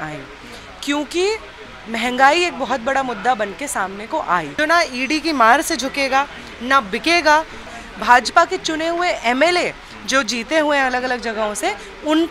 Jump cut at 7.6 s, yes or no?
yes